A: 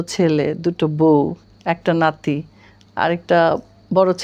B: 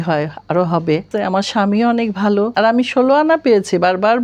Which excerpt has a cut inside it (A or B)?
B